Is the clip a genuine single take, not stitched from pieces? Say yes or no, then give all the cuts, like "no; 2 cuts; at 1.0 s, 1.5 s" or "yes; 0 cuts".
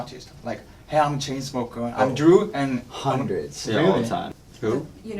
no; 1 cut; at 4.3 s